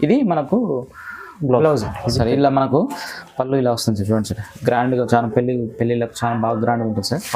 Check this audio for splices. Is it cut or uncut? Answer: cut